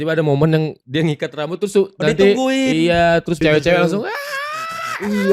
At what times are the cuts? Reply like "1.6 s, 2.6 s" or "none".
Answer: 3.4 s